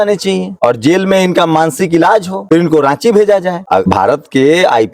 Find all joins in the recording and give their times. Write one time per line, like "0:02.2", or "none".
0:02.3
0:03.7